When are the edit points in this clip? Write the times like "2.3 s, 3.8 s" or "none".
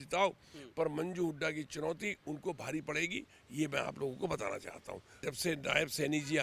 5.2 s